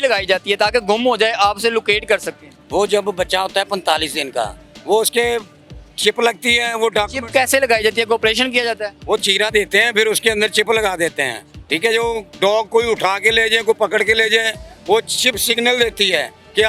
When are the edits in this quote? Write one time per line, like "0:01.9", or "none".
none